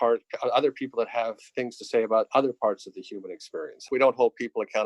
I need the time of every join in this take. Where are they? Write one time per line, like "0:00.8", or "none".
0:03.9